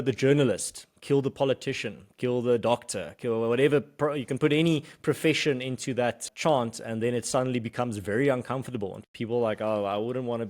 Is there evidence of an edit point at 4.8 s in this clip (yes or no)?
no